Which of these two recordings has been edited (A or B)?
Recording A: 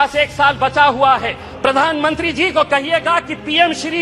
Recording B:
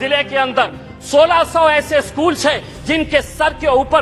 A